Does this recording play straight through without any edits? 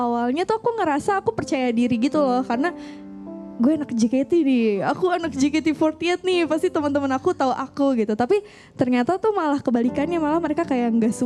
yes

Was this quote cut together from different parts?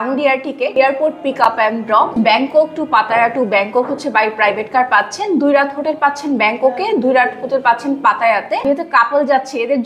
yes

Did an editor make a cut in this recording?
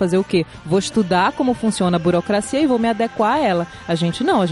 no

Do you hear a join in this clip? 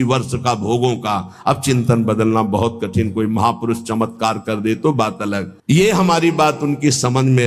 no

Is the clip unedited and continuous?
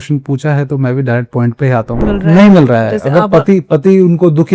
no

